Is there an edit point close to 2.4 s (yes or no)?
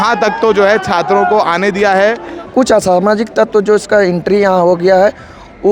yes